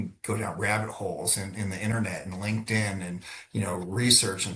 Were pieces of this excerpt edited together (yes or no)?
no